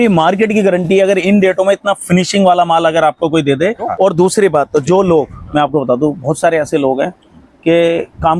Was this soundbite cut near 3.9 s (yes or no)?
yes